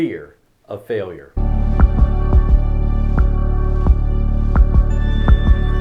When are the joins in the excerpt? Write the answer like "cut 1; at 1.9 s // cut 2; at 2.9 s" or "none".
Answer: cut 1; at 1.3 s // cut 2; at 4.9 s